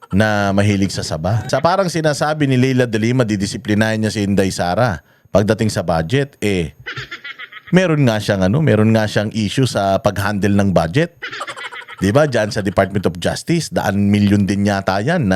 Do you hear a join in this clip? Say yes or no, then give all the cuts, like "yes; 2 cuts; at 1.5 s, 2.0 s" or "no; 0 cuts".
yes; 1 cut; at 1.4 s